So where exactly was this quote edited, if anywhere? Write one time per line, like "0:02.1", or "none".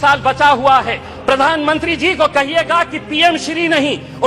0:01.1